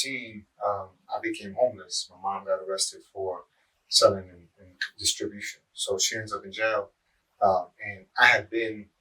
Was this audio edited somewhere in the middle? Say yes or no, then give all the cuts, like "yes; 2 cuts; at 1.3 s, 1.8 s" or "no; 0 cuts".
no; 0 cuts